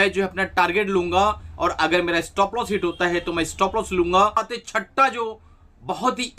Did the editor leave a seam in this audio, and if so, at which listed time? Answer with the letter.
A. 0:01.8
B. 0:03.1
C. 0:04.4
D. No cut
C